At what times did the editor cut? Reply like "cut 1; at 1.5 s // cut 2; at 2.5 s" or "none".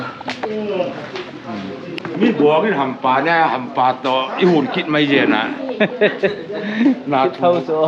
cut 1; at 2.0 s

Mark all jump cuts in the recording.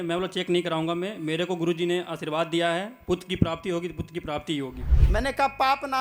cut 1; at 4.8 s

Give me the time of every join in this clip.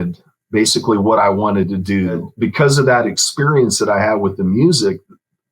cut 1; at 2.3 s

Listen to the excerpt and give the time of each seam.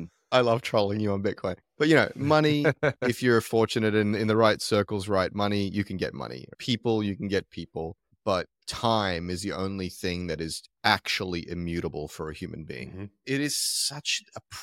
cut 1; at 13.2 s

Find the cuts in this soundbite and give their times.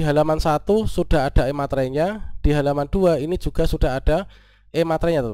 none

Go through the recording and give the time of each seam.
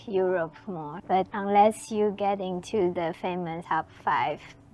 cut 1; at 1.1 s // cut 2; at 3.6 s

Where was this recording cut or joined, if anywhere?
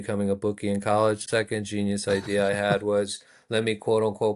cut 1; at 1.2 s

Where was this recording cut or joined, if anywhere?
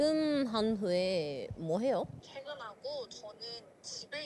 none

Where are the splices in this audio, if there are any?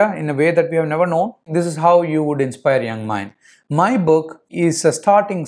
cut 1; at 1.5 s // cut 2; at 4.5 s

